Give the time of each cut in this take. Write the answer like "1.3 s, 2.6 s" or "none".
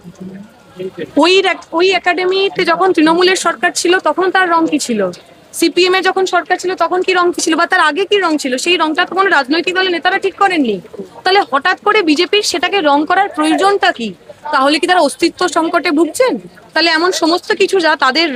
none